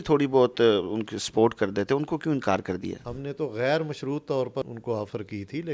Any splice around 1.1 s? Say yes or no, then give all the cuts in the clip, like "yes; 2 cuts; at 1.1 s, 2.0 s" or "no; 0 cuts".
no; 2 cuts; at 3.1 s, 4.6 s